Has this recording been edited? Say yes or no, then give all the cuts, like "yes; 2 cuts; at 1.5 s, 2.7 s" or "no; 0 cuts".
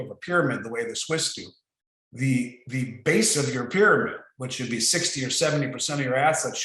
no; 0 cuts